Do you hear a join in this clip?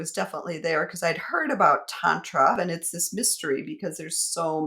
yes; 1 cut; at 2.6 s

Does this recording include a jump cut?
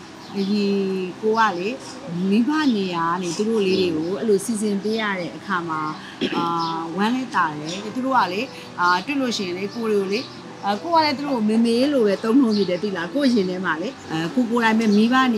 yes; 2 cuts; at 7.9 s, 14.0 s

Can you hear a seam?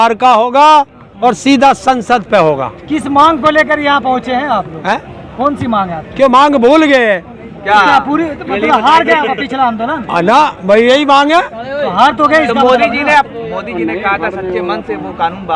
no; 0 cuts

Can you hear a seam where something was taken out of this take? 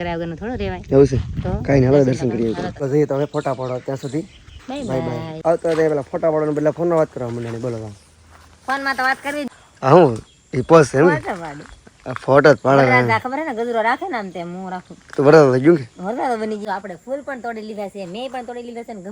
yes; 4 cuts; at 2.8 s, 5.3 s, 9.5 s, 16.6 s

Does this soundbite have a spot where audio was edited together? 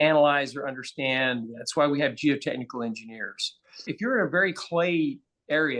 yes; 1 cut; at 3.9 s

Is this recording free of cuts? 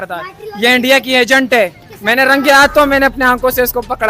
no; 1 cut; at 1.9 s

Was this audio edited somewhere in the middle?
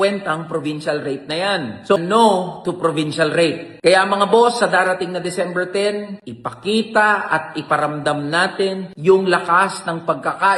yes; 1 cut; at 2.0 s

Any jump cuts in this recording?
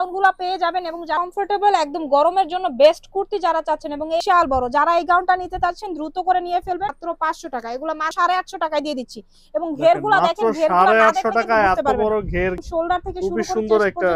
yes; 5 cuts; at 1.2 s, 4.2 s, 7.0 s, 8.1 s, 12.6 s

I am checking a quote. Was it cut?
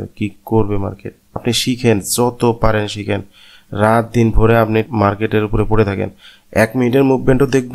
yes; 2 cuts; at 1.4 s, 4.9 s

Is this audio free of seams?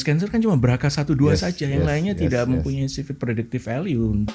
yes; 0 cuts

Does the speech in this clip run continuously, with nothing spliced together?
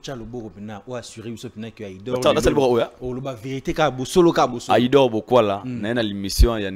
yes; 0 cuts

